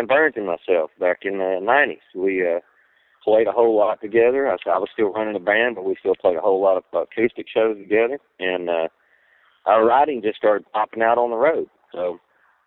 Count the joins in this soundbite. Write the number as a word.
zero